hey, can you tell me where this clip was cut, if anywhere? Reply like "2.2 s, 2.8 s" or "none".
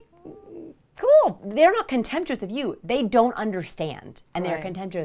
1.4 s